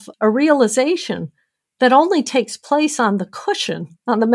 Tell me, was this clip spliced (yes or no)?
no